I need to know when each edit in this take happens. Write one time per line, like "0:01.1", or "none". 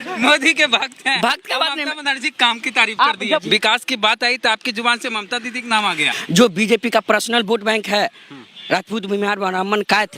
0:03.4
0:06.1